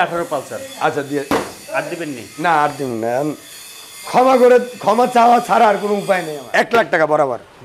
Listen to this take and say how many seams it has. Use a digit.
1